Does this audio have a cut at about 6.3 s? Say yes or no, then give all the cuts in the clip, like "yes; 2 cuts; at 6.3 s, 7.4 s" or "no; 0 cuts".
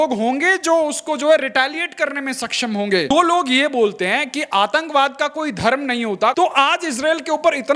yes; 2 cuts; at 3.1 s, 6.3 s